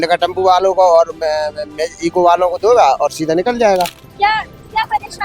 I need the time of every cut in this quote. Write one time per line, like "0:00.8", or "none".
0:04.0